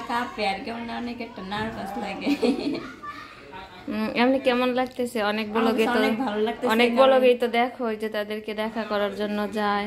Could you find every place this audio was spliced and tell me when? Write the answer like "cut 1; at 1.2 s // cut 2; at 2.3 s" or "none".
none